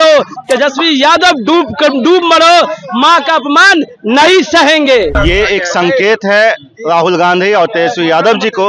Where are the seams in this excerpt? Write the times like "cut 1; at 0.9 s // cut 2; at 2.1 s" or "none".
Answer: cut 1; at 5.2 s